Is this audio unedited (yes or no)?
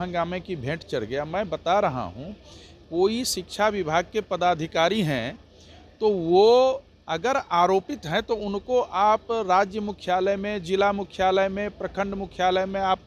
yes